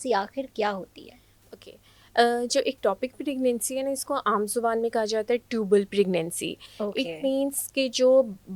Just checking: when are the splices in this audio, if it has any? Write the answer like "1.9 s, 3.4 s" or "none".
none